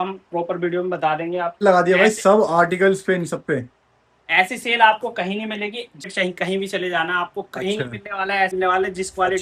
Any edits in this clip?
yes; 3 cuts; at 1.6 s, 6.1 s, 8.5 s

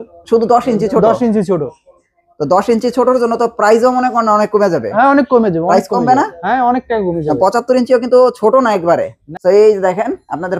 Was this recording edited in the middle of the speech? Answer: yes; 1 cut; at 9.2 s

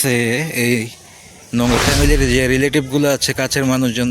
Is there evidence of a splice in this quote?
yes; 1 cut; at 1.8 s

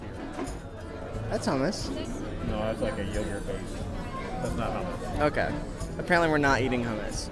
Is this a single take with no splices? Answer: no; 2 cuts; at 1.0 s, 2.1 s

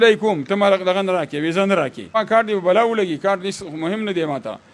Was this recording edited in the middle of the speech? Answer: yes; 1 cut; at 2.1 s

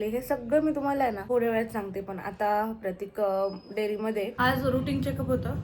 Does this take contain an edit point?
yes; 1 cut; at 4.3 s

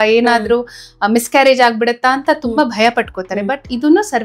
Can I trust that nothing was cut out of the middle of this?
yes; 0 cuts

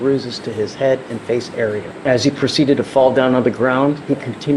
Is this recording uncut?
no; 1 cut; at 1.9 s

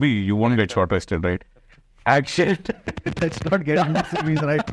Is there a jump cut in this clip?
no; 0 cuts

